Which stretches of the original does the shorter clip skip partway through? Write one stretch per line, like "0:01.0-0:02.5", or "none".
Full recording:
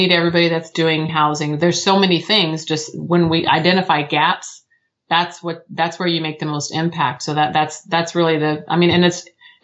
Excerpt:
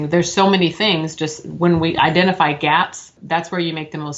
0:04.7-0:05.6